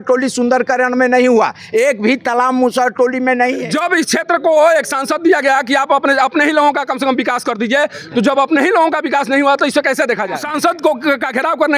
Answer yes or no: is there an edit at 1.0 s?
no